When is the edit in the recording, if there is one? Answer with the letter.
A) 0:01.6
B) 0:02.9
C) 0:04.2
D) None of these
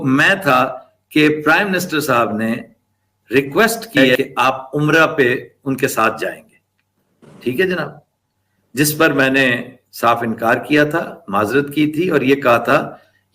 C